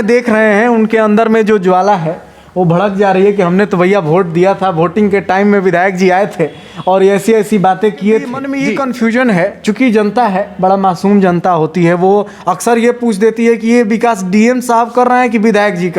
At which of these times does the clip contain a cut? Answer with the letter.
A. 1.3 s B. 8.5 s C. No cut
B